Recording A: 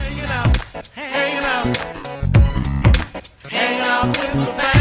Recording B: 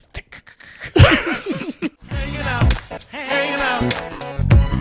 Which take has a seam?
B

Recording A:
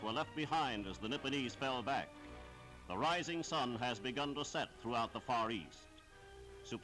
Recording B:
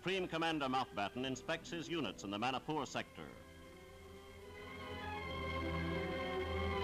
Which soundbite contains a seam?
A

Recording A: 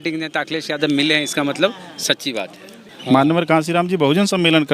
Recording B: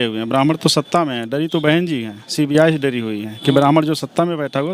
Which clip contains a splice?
A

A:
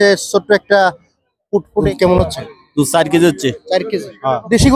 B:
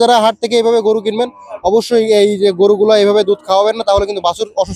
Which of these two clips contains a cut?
A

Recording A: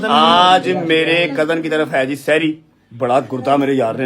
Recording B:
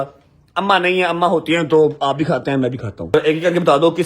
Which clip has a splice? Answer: B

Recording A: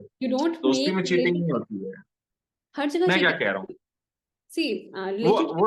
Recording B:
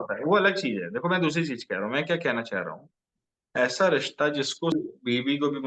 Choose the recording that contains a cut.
B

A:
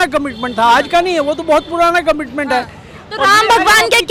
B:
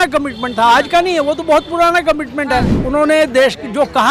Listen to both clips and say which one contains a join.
B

